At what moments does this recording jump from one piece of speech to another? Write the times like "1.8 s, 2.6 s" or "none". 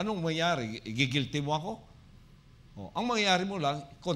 none